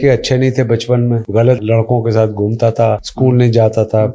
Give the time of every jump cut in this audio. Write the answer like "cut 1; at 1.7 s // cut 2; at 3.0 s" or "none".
cut 1; at 1.5 s // cut 2; at 3.1 s